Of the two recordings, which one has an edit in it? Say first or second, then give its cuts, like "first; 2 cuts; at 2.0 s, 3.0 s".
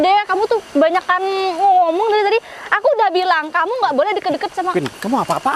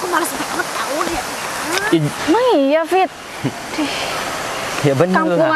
second; 1 cut; at 2.1 s